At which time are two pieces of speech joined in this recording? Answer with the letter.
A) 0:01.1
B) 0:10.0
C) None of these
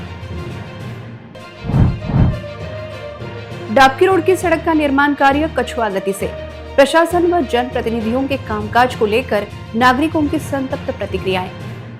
A